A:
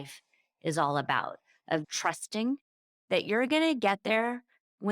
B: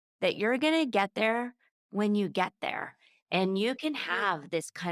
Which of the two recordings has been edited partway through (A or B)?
A